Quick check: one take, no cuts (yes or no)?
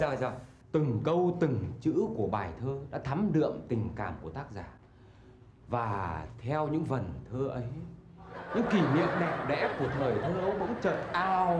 yes